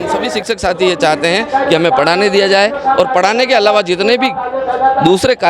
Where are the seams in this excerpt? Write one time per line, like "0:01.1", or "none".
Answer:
none